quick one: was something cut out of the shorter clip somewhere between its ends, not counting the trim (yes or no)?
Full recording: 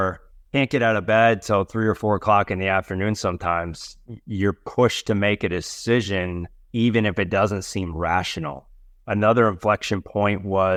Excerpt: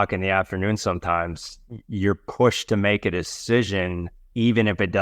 no